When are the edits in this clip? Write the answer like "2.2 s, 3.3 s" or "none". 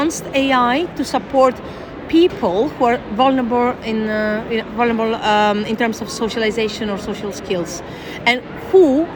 none

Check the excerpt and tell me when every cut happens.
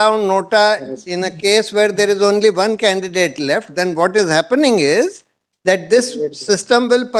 none

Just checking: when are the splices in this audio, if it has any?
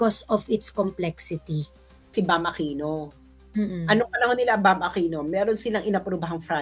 2.1 s

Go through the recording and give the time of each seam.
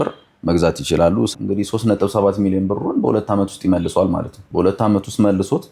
1.3 s, 4.3 s

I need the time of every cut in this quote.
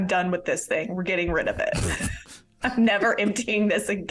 none

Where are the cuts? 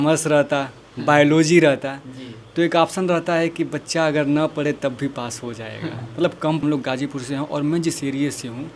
6.6 s

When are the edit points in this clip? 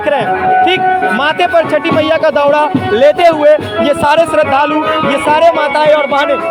none

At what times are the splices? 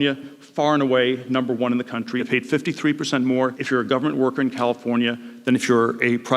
2.3 s, 3.6 s

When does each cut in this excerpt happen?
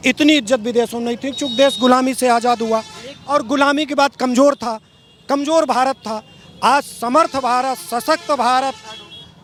none

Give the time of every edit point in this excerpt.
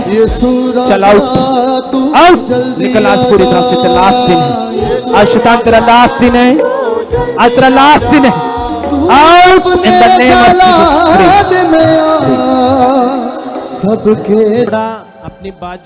14.7 s

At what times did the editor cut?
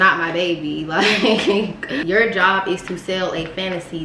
1.9 s

